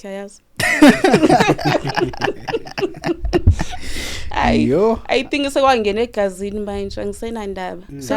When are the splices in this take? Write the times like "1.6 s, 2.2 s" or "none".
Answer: none

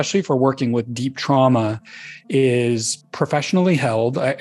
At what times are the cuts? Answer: 3.0 s

